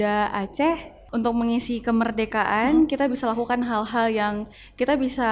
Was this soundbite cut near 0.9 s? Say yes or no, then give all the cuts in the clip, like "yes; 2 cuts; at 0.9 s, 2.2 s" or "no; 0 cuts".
yes; 1 cut; at 0.9 s